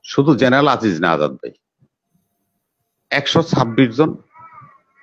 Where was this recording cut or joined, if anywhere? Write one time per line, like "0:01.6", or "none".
none